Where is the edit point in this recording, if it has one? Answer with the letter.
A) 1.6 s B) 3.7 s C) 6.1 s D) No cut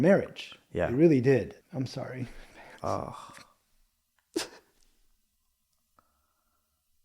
A